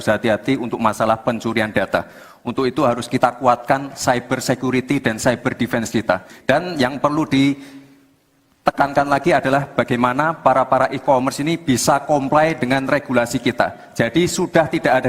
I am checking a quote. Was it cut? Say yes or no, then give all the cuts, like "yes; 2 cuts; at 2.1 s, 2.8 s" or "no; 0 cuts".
yes; 1 cut; at 6.3 s